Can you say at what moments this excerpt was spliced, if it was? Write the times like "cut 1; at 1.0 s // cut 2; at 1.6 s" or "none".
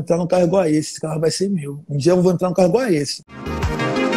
cut 1; at 3.2 s